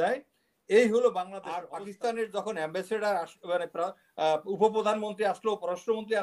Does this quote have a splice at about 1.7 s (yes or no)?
yes